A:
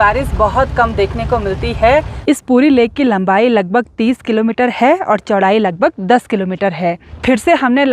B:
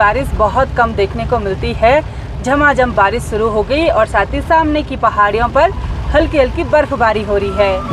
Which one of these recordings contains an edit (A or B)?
A